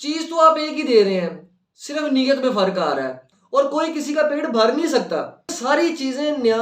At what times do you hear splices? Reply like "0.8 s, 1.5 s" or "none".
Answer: 3.3 s, 5.6 s